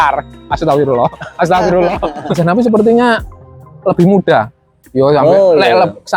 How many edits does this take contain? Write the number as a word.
one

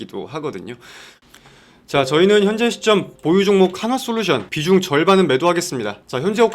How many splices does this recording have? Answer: one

